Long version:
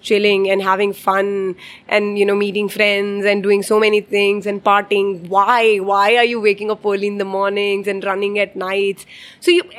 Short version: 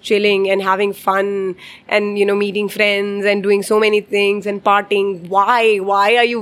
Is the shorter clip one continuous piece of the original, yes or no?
yes